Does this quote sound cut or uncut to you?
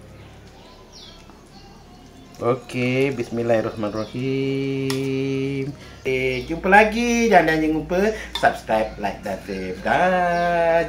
cut